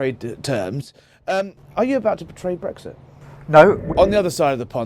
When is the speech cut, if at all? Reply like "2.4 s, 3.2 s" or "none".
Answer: 3.8 s